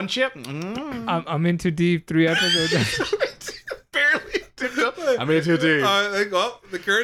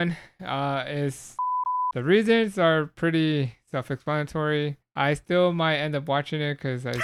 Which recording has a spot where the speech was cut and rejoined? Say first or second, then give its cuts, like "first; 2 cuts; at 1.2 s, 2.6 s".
second; 2 cuts; at 1.6 s, 4.8 s